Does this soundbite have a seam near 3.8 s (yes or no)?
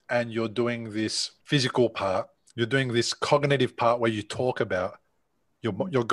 no